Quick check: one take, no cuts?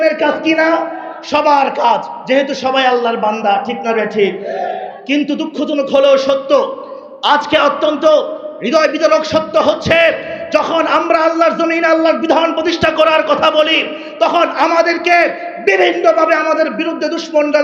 yes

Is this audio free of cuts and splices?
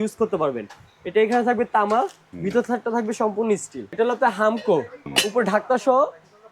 no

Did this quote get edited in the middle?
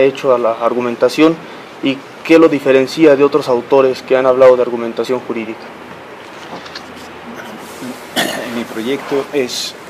no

